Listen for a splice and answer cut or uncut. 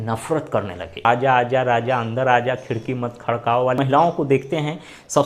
cut